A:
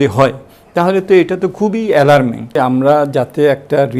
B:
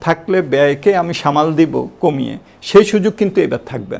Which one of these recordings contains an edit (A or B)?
A